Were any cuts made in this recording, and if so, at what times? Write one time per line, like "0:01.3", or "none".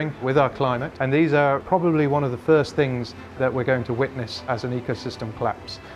0:00.9